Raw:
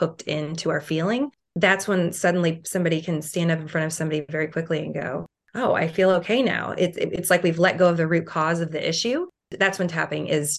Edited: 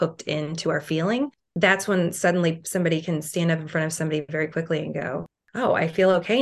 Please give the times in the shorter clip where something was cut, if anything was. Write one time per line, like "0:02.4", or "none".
none